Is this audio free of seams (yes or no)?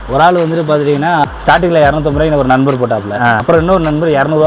no